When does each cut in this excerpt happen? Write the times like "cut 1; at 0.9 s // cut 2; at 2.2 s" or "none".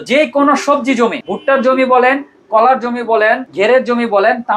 cut 1; at 1.3 s // cut 2; at 3.5 s

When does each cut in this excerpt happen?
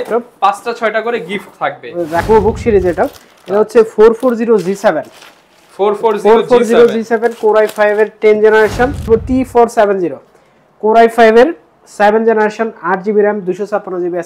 cut 1; at 2.2 s // cut 2; at 9.1 s

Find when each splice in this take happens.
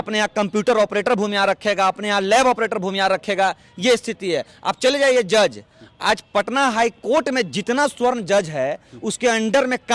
none

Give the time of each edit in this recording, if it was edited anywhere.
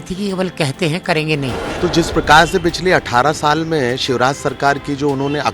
cut 1; at 1.6 s

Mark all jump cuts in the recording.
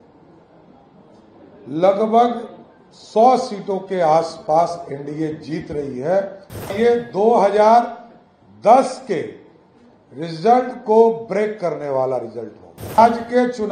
cut 1; at 6.7 s // cut 2; at 13.0 s

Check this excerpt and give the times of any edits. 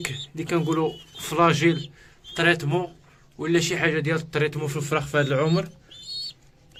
none

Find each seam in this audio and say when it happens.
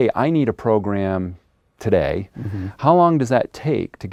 none

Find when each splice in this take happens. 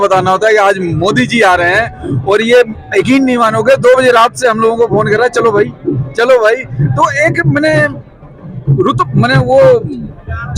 none

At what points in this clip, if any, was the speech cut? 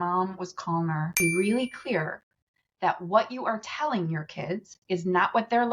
cut 1; at 1.2 s

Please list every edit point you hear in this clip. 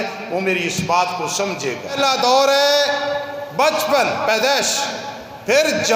cut 1; at 1.9 s

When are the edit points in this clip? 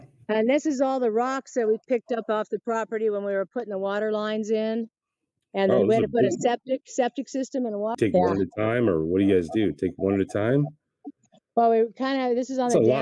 cut 1; at 8.0 s

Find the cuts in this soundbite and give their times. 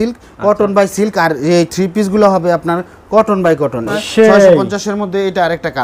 cut 1; at 3.9 s

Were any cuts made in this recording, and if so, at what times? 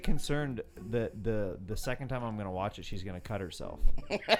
none

